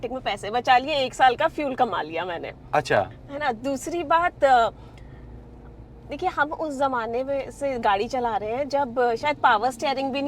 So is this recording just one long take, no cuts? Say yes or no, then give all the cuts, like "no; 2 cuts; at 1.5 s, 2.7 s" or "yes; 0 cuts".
yes; 0 cuts